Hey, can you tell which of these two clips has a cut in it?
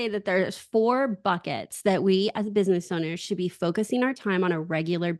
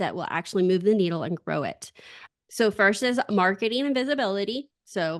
second; 1 cut; at 2.1 s

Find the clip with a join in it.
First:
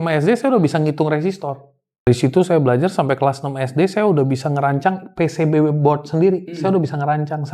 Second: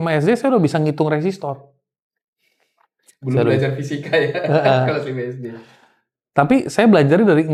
first; 1 cut; at 2.1 s

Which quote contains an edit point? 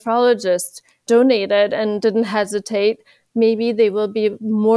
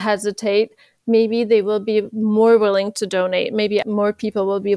second; 1 cut; at 3.8 s

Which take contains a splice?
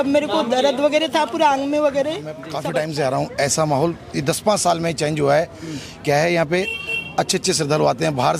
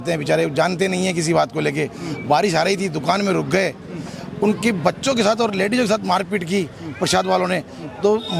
first; 1 cut; at 2.5 s

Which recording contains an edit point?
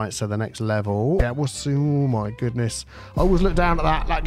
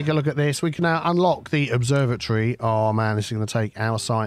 first; 1 cut; at 1.2 s

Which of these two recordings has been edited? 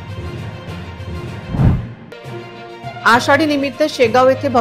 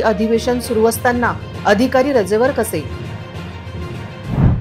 first; 1 cut; at 1.6 s

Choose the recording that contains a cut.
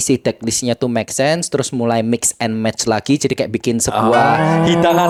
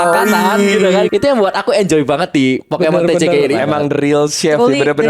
second; 2 cuts; at 1.1 s, 3.5 s

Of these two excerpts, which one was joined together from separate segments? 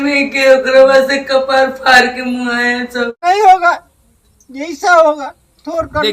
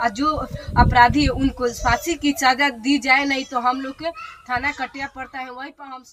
first; 1 cut; at 3.2 s

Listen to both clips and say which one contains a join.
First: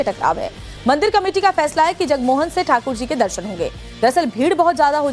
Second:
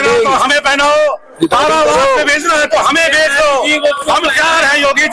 first; 1 cut; at 1.0 s

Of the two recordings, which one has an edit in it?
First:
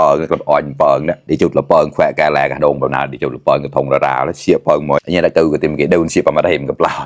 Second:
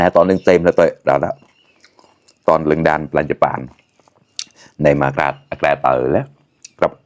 first; 2 cuts; at 1.2 s, 5.0 s

